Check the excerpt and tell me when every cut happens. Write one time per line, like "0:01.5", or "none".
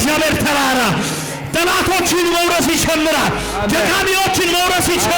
none